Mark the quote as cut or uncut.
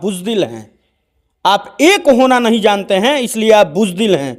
uncut